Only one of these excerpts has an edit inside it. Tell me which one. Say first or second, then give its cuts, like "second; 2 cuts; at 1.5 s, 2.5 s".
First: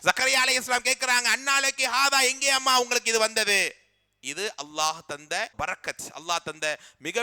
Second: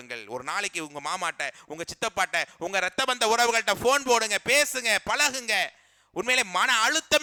first; 1 cut; at 5.5 s